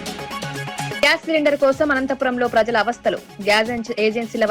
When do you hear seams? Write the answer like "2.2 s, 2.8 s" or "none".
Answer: 1.0 s